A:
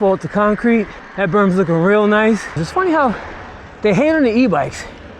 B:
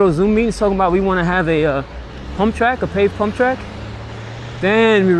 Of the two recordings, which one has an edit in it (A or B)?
A